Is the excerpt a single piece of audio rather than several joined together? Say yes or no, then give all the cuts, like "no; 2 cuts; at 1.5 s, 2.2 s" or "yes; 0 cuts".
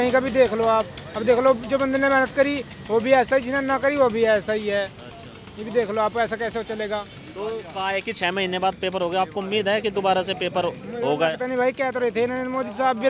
yes; 0 cuts